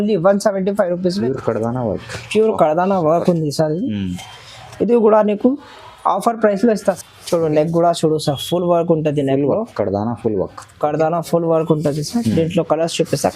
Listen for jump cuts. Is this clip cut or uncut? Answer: cut